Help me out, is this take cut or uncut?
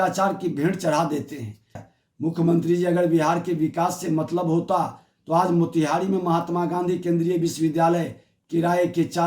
cut